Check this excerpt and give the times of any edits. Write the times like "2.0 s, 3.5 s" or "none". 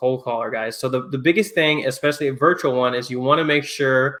none